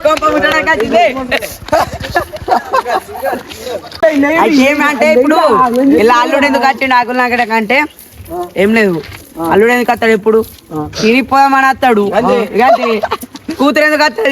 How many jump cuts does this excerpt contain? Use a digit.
1